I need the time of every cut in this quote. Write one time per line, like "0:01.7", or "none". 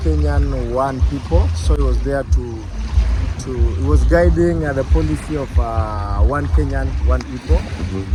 none